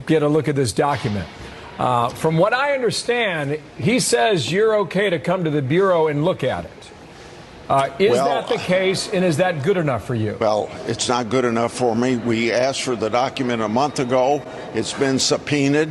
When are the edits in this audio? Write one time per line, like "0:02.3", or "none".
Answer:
0:10.4